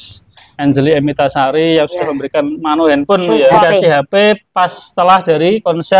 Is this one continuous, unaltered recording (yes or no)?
no